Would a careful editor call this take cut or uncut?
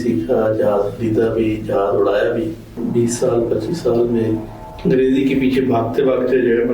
cut